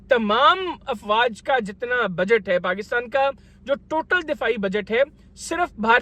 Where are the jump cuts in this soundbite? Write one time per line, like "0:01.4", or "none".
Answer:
none